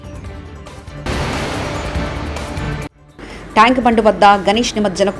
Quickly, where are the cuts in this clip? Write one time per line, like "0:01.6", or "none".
0:01.0